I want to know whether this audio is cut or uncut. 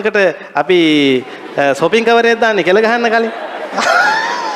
uncut